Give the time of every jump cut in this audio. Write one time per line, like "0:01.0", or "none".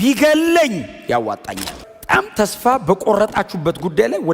0:01.7